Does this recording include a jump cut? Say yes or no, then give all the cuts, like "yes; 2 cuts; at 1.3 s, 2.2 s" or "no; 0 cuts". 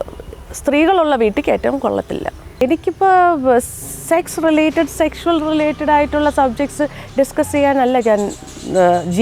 yes; 1 cut; at 2.5 s